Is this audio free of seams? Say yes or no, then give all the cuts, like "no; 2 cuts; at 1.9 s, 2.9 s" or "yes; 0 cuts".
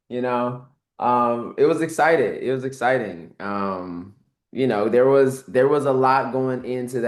yes; 0 cuts